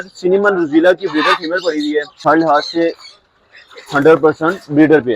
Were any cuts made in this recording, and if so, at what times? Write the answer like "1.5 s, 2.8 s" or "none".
2.2 s